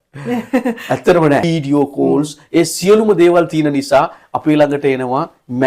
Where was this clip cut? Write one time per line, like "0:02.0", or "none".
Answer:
0:01.5